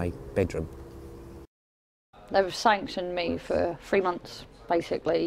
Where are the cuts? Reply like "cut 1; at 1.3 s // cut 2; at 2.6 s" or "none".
cut 1; at 1.5 s

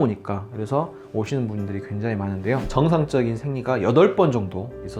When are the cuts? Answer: cut 1; at 2.6 s

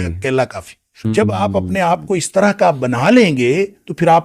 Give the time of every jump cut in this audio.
cut 1; at 1.0 s

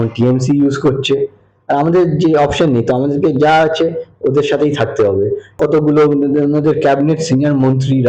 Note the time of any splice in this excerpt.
cut 1; at 5.4 s

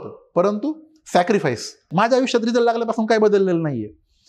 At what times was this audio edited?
cut 1; at 1.9 s

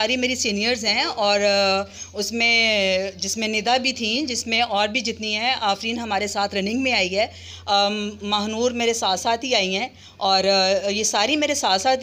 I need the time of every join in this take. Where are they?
none

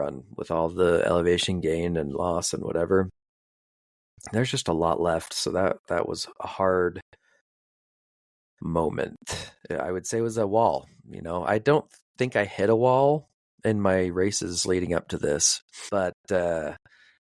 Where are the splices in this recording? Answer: cut 1; at 15.8 s

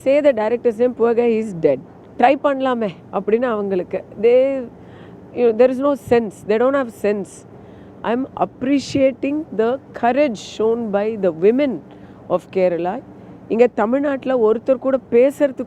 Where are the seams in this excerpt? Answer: none

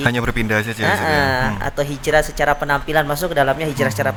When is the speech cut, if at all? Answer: none

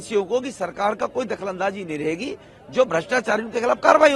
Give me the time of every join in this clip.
none

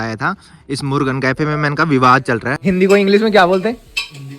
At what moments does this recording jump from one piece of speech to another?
cut 1; at 2.5 s

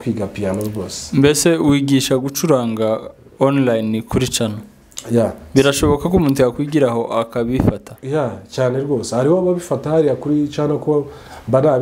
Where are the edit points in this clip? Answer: none

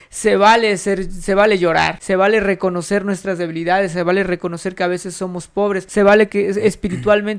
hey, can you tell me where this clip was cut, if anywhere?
cut 1; at 2.0 s // cut 2; at 5.9 s

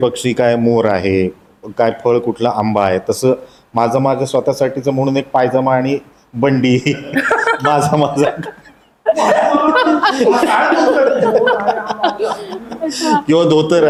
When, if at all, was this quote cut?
none

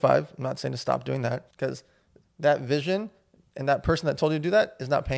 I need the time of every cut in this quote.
cut 1; at 1.5 s

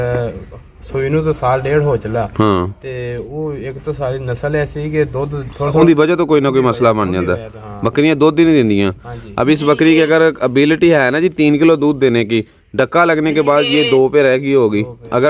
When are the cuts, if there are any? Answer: cut 1; at 5.8 s

